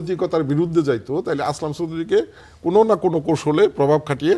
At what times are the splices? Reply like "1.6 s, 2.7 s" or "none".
none